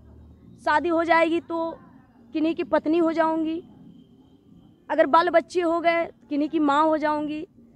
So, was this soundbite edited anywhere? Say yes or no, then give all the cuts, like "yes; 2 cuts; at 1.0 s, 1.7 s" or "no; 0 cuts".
no; 0 cuts